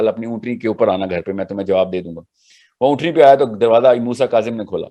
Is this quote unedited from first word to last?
yes; 0 cuts

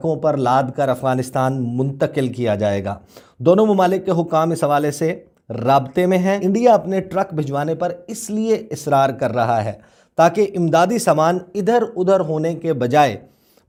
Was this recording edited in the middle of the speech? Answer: no; 0 cuts

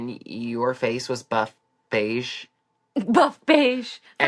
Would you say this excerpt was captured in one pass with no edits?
yes; 0 cuts

